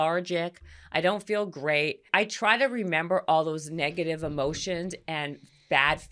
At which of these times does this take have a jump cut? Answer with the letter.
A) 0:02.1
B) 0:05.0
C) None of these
A